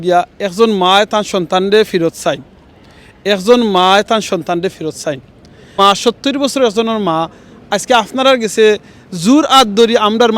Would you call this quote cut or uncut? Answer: cut